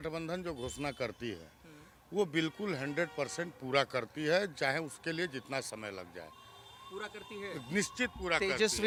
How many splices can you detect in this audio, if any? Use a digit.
0